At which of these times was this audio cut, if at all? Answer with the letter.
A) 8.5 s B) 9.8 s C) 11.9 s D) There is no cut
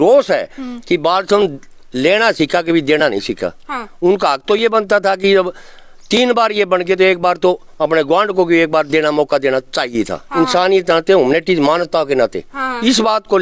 D